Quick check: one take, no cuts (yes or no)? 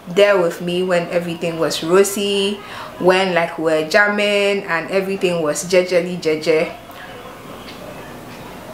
yes